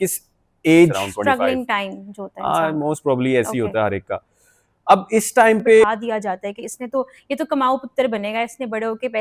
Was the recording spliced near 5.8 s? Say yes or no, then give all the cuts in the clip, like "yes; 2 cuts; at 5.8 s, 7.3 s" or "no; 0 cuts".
yes; 2 cuts; at 1.0 s, 5.8 s